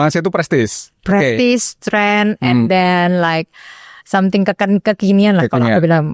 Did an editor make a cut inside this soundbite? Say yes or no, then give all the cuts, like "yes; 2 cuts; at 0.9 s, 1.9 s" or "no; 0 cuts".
no; 0 cuts